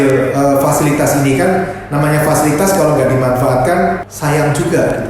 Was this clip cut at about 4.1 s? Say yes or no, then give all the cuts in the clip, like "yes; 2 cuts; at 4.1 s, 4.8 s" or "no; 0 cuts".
yes; 1 cut; at 4.1 s